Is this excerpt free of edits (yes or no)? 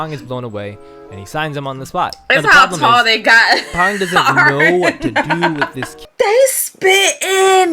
no